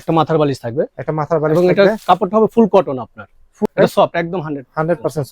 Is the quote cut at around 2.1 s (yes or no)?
no